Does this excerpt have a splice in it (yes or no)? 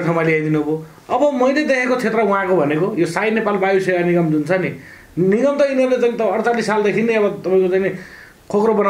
no